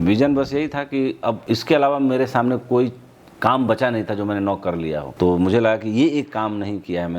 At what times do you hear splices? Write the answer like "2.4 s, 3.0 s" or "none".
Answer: 1.4 s, 5.1 s